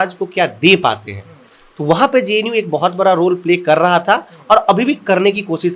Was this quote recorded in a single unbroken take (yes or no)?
yes